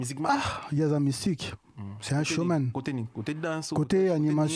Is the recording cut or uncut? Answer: uncut